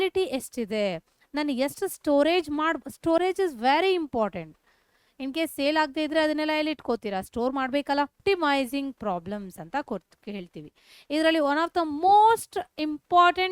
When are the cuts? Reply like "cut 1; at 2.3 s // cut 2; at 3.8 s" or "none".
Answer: cut 1; at 8.2 s